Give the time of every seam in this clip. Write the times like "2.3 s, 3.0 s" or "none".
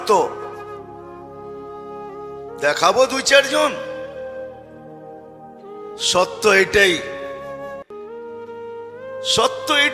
7.0 s, 8.6 s